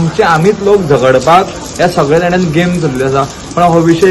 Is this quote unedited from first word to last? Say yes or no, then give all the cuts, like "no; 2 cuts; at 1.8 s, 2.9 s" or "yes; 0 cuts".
yes; 0 cuts